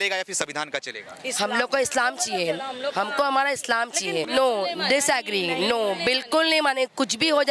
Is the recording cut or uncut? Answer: cut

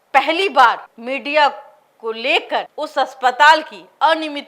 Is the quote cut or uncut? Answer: cut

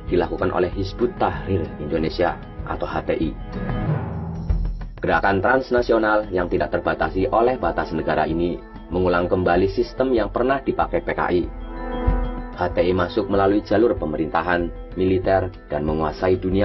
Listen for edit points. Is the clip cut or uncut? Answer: uncut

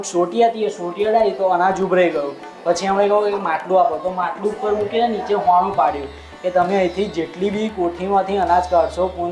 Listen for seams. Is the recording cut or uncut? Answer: uncut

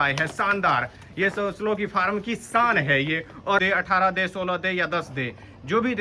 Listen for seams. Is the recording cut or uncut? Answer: cut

